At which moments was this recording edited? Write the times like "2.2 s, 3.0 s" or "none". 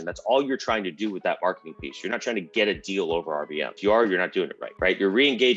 3.7 s, 4.6 s

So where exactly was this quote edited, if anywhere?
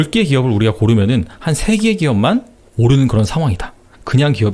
none

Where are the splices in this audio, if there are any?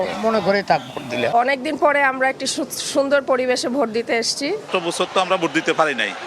1.2 s, 4.7 s

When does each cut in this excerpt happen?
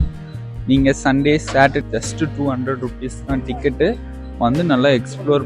1.8 s

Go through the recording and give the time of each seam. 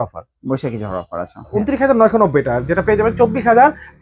1.5 s

